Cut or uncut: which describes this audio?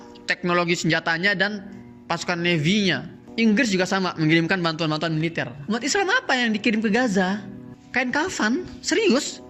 uncut